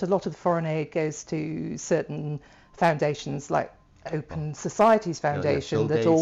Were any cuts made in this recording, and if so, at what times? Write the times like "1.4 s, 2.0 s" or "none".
none